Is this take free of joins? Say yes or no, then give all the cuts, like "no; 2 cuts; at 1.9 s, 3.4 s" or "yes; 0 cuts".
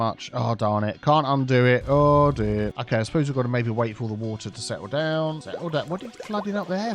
no; 2 cuts; at 2.8 s, 5.5 s